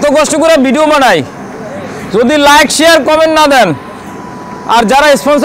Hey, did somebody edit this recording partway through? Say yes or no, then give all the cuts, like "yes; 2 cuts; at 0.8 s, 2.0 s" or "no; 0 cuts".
no; 0 cuts